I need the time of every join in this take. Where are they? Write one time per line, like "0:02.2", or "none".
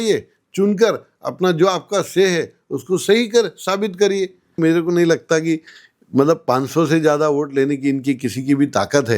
0:04.5